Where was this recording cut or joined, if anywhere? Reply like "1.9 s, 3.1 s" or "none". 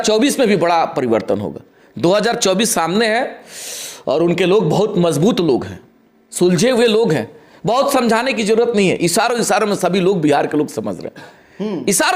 none